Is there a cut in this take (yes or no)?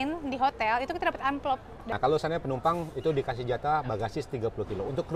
yes